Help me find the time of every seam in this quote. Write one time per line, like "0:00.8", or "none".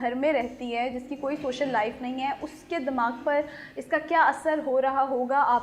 none